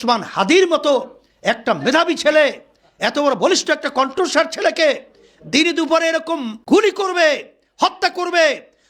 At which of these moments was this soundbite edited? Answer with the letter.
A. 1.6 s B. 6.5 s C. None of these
B